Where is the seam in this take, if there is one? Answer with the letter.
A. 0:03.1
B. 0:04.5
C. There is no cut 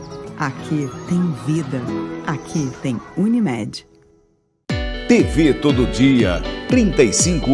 B